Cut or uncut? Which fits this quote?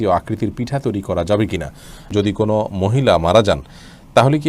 cut